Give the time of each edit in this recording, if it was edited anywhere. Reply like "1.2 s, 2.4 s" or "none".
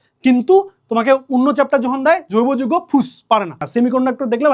3.6 s